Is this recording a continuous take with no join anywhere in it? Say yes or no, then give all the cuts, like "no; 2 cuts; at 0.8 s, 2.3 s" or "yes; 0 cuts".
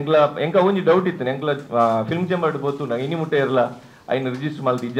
yes; 0 cuts